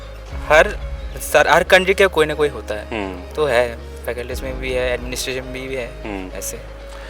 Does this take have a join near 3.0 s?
no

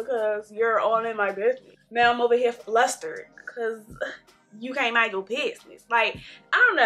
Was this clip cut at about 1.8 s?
no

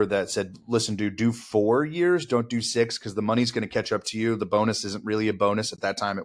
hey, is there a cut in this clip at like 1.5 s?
no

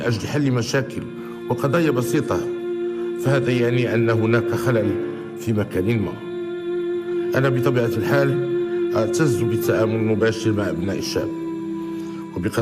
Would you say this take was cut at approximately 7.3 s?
yes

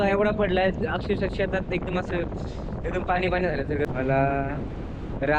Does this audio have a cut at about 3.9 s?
yes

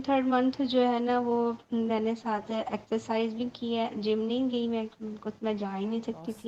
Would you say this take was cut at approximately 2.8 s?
no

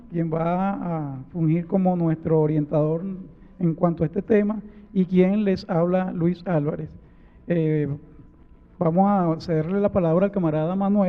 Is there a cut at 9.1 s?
yes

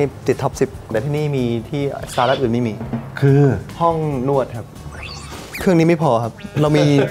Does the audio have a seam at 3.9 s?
no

